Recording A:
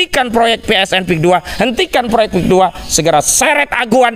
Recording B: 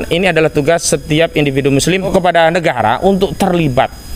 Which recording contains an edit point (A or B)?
B